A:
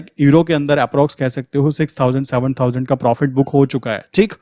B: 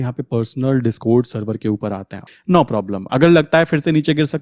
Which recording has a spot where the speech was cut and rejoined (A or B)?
B